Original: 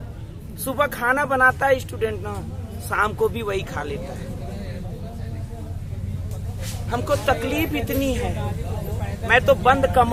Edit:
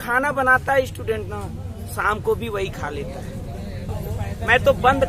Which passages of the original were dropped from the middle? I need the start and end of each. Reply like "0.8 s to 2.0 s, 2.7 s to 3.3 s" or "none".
4.8 s to 8.7 s